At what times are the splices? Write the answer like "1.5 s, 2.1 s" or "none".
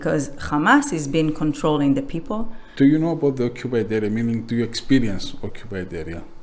2.6 s